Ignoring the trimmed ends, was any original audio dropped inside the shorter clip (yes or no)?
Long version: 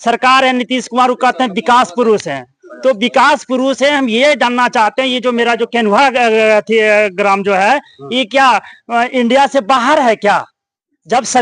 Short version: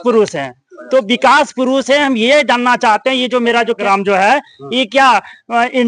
yes